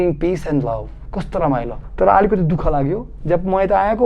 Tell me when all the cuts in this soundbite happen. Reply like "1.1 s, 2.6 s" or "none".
1.8 s